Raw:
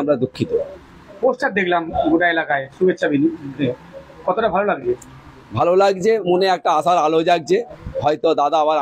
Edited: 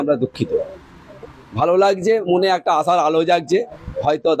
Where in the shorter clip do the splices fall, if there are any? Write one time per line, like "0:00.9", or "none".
0:01.1